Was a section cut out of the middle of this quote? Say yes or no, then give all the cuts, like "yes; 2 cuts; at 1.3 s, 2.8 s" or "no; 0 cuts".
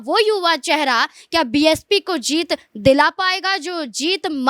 no; 0 cuts